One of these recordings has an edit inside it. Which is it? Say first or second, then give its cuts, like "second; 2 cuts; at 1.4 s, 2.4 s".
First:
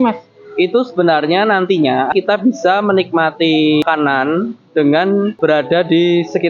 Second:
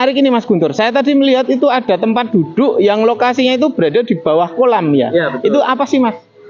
first; 3 cuts; at 2.1 s, 3.8 s, 5.3 s